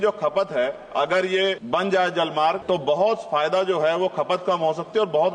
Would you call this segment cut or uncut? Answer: cut